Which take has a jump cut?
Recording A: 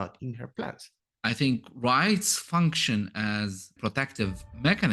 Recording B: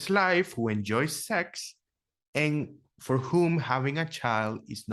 A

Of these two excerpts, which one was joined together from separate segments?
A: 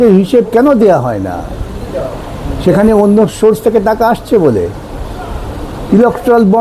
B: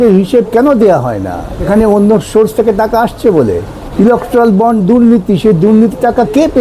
B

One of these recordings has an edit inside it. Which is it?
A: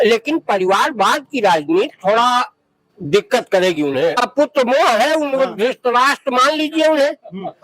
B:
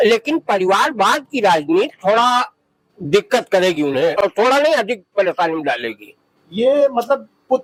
A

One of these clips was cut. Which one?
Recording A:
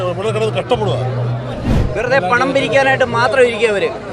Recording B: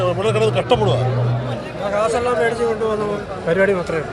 A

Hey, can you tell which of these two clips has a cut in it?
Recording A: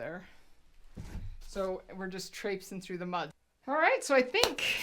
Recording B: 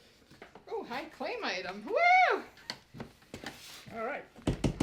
A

